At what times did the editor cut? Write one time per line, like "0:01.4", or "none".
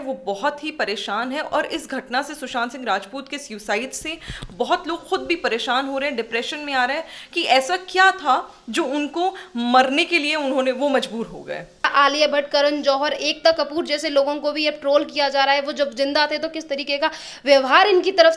none